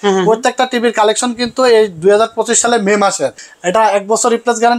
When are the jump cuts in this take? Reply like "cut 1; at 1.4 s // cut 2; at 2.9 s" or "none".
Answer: cut 1; at 3.4 s